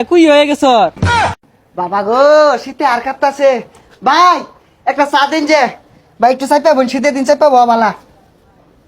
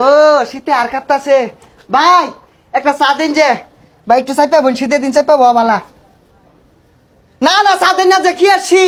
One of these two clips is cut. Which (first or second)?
first